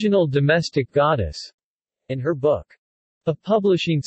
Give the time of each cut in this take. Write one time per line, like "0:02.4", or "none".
none